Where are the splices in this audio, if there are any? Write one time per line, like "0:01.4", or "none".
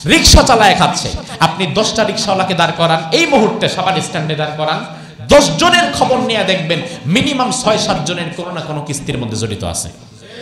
none